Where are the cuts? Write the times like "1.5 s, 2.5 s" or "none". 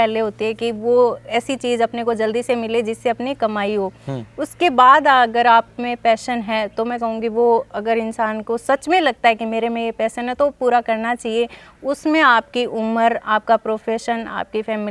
none